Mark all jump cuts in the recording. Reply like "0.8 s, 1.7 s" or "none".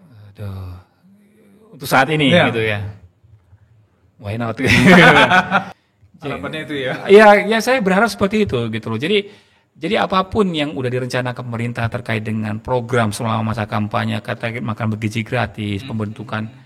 5.8 s